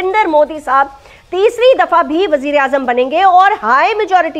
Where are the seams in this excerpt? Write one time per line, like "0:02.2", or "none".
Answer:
none